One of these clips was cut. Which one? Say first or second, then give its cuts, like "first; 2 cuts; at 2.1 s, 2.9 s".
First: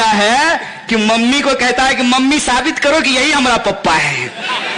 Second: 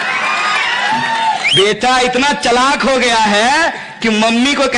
second; 1 cut; at 1.4 s